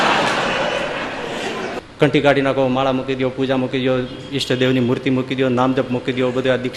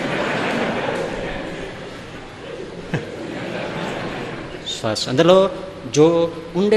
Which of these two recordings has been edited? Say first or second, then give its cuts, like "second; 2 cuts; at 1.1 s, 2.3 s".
first; 1 cut; at 1.8 s